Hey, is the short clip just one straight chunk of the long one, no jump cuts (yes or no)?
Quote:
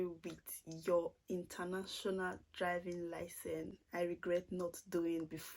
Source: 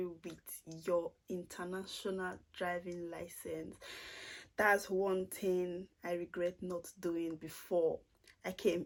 no